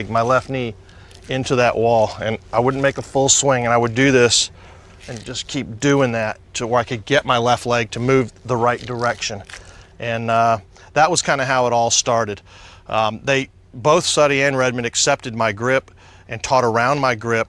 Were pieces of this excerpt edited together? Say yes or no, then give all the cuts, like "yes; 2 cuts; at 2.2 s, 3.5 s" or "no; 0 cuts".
no; 0 cuts